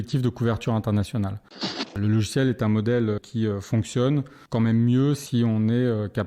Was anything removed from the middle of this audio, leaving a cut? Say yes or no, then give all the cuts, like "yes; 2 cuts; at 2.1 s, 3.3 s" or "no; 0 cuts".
yes; 3 cuts; at 1.9 s, 3.2 s, 4.4 s